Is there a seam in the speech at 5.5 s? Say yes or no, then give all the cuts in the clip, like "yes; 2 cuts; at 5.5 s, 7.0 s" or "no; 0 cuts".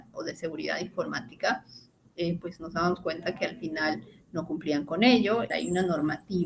yes; 1 cut; at 5.5 s